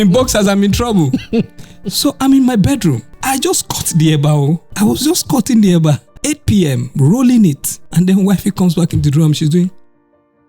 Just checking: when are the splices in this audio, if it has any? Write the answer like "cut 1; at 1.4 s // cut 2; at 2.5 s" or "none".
cut 1; at 3.1 s // cut 2; at 4.7 s // cut 3; at 6.1 s // cut 4; at 7.7 s